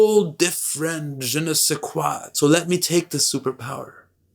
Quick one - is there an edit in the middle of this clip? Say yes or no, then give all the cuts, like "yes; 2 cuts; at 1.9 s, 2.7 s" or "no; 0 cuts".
yes; 1 cut; at 2.2 s